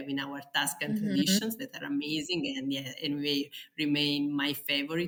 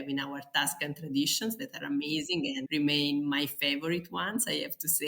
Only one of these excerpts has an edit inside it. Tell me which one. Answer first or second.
second